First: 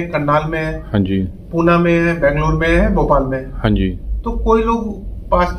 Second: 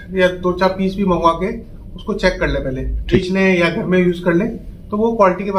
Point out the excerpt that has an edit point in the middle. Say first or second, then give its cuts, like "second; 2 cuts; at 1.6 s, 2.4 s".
second; 1 cut; at 3.2 s